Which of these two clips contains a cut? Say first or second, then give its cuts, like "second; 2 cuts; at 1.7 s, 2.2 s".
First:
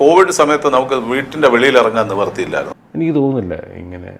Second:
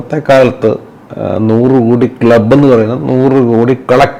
first; 1 cut; at 2.6 s